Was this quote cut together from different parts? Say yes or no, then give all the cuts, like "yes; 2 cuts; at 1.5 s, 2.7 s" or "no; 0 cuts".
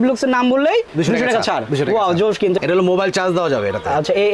yes; 1 cut; at 2.6 s